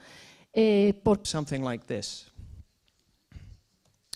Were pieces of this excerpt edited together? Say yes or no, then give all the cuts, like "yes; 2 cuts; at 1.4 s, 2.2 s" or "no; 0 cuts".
no; 0 cuts